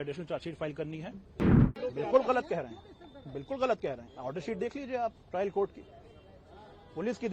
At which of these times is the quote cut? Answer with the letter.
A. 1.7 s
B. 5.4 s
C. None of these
A